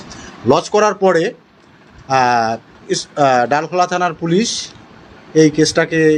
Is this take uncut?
yes; 0 cuts

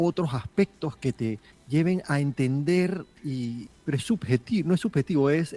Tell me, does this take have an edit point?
yes; 2 cuts; at 1.5 s, 3.7 s

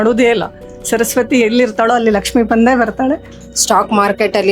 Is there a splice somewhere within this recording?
yes; 1 cut; at 3.4 s

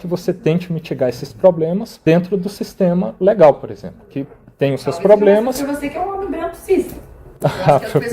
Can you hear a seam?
yes; 1 cut; at 1.9 s

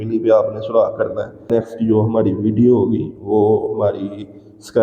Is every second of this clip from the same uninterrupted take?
no; 1 cut; at 1.4 s

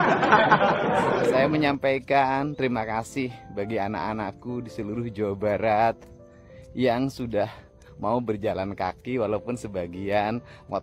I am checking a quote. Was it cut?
yes; 1 cut; at 1.3 s

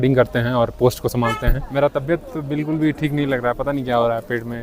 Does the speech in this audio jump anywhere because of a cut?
yes; 1 cut; at 1.6 s

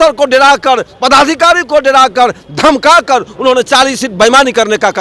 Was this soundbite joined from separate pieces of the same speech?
no; 0 cuts

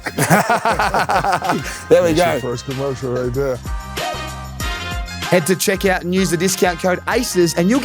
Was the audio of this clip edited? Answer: yes; 2 cuts; at 3.6 s, 5.3 s

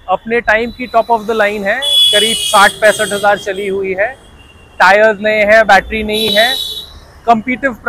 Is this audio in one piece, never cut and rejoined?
yes; 0 cuts

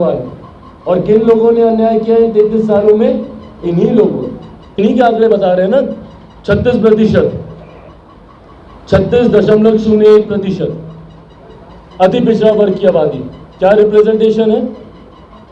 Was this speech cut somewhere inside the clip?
yes; 1 cut; at 4.7 s

